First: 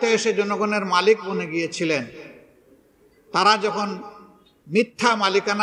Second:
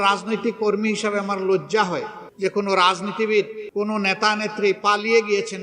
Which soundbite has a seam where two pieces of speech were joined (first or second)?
second